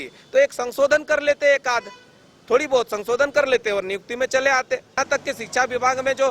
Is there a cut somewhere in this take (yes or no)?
yes